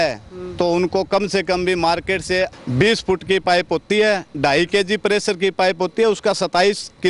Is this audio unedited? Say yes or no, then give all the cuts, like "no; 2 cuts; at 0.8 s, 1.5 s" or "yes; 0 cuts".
no; 1 cut; at 2.6 s